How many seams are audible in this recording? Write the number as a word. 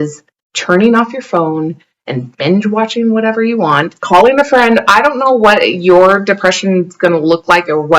one